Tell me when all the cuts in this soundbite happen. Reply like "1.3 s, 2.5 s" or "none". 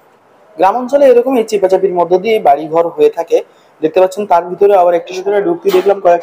5.2 s